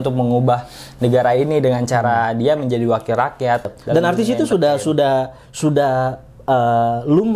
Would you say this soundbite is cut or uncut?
cut